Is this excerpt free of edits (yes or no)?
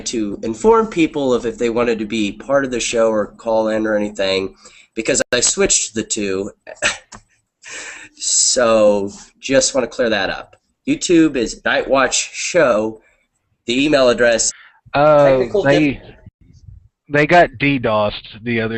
yes